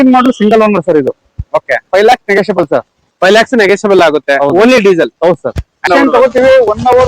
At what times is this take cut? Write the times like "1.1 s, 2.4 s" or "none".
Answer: 5.9 s